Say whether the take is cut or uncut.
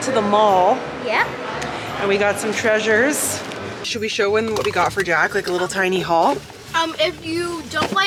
uncut